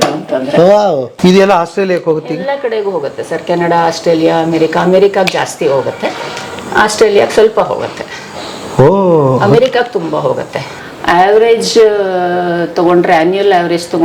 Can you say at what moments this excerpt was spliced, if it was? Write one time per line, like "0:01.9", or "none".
0:01.1
0:10.8